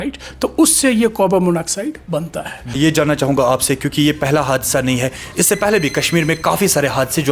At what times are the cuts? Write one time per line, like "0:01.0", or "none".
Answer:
0:02.8